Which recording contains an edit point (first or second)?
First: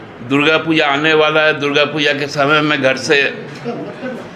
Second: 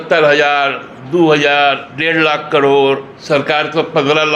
second